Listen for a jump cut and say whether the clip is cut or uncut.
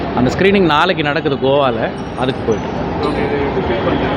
uncut